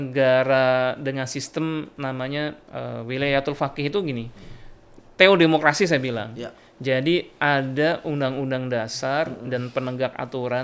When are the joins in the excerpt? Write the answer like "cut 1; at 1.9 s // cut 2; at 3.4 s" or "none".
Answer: none